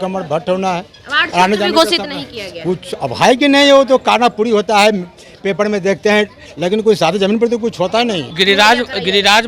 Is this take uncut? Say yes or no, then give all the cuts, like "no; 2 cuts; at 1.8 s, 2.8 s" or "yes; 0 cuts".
no; 1 cut; at 8.3 s